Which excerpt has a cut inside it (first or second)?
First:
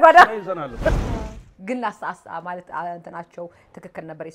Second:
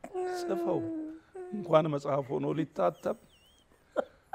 first